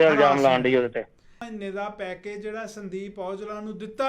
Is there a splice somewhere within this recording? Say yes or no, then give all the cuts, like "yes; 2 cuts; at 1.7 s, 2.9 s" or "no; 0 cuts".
yes; 1 cut; at 1.5 s